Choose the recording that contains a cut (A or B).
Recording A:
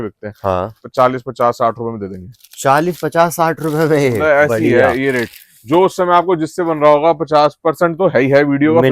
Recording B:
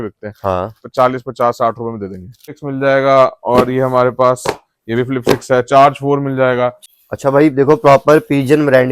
B